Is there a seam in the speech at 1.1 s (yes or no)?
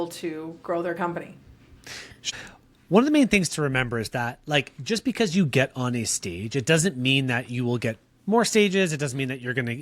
no